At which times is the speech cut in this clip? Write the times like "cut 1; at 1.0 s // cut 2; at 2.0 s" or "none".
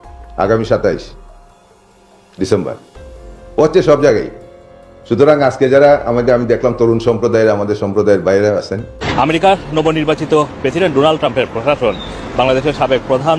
cut 1; at 9.0 s